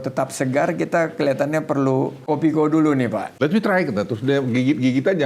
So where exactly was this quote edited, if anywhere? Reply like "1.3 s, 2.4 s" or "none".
2.2 s, 3.3 s